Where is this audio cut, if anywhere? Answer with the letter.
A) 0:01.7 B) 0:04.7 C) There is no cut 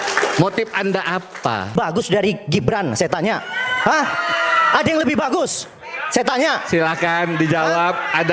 A